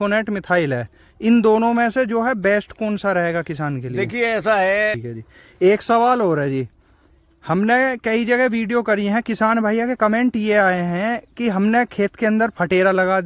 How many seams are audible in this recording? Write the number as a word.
one